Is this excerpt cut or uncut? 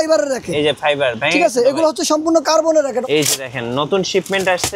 cut